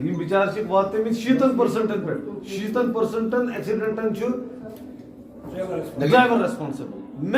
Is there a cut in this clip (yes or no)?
yes